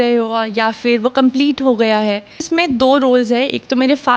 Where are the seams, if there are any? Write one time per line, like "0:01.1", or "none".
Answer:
0:02.5